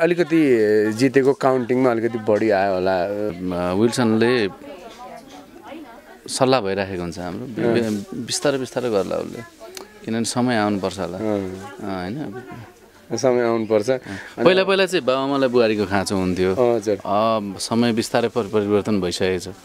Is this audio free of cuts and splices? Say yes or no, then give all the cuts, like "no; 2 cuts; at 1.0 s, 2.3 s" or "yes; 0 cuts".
no; 1 cut; at 3.3 s